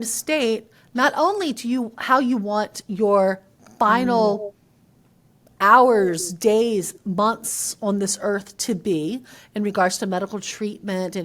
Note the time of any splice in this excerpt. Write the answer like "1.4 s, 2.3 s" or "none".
none